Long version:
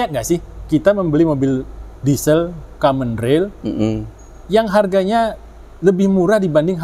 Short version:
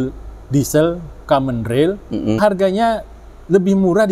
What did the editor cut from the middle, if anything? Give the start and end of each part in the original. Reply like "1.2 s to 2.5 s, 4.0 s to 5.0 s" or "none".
3.9 s to 4.7 s